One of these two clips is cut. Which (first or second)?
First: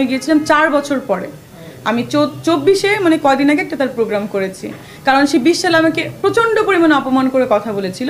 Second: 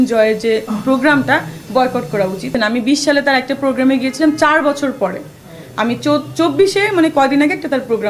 second